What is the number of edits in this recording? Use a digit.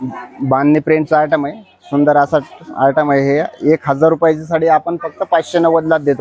0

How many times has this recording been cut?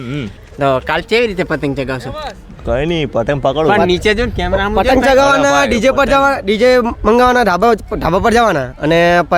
0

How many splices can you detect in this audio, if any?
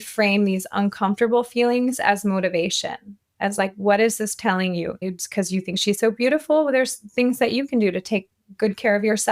1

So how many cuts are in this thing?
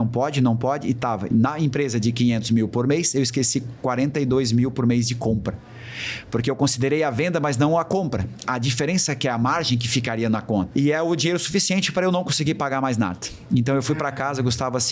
1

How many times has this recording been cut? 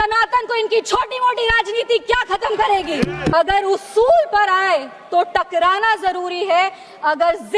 1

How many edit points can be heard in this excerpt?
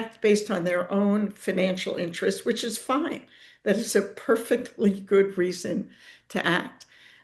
0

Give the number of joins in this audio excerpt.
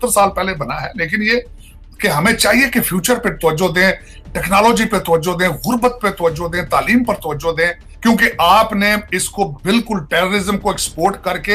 1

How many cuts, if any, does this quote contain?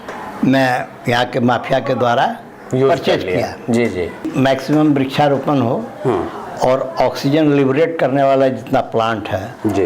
1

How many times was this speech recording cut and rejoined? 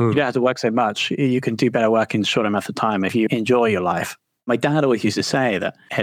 2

